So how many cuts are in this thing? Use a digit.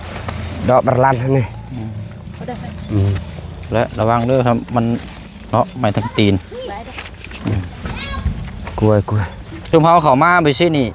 1